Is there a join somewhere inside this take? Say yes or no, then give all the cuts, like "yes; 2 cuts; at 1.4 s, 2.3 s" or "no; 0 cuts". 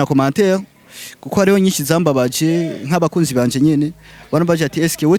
no; 0 cuts